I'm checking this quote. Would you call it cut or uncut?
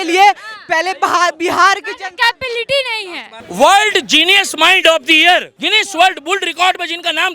cut